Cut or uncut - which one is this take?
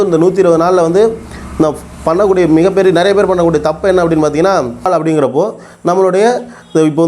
cut